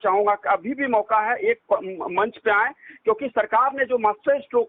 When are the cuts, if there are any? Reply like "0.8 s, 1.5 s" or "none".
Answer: none